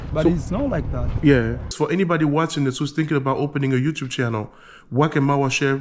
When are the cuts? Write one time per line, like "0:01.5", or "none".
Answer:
0:01.7